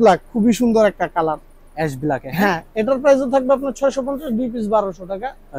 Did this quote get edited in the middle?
no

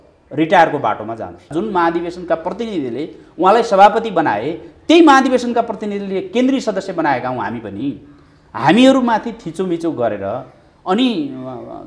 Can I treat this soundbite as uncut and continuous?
no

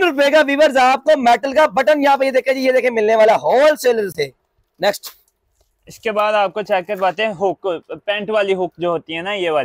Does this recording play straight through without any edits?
yes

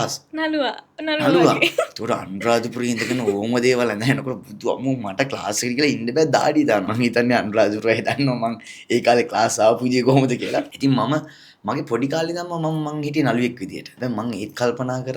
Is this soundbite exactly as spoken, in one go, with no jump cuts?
no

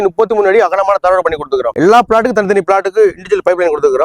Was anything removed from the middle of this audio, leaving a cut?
yes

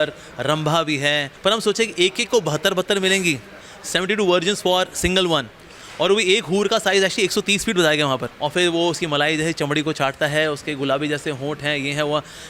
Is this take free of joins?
no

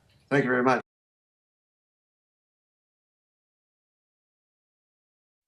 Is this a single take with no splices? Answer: yes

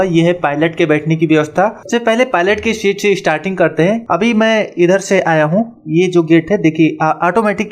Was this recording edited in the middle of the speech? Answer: yes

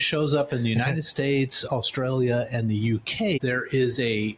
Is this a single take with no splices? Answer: no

